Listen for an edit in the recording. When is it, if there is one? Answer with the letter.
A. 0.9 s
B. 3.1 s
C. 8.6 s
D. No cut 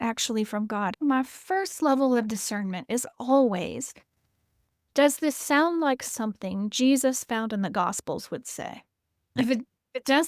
A